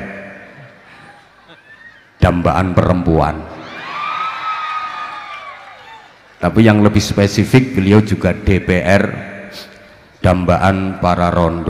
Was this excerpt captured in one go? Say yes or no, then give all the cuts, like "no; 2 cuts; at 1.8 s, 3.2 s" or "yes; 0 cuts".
yes; 0 cuts